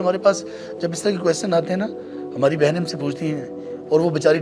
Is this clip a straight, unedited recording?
yes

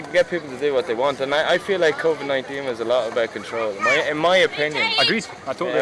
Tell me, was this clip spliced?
no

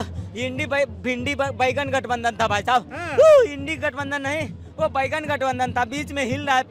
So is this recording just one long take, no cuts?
yes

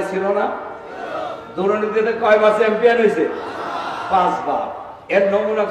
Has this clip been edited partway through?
no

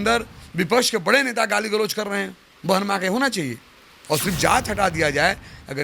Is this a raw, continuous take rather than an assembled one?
no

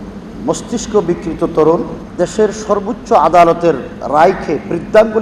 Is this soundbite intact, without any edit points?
no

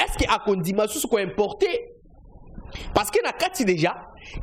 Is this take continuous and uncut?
yes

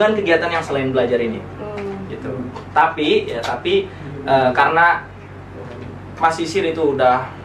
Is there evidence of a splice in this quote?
no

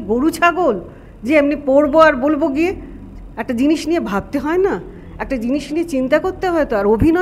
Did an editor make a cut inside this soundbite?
no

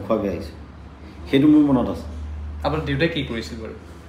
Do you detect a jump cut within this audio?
no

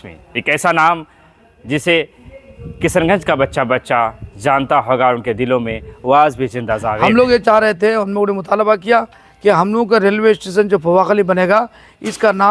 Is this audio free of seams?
no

